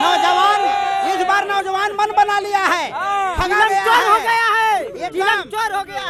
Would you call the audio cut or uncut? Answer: uncut